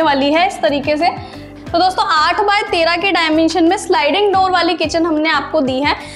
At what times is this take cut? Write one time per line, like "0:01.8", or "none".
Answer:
none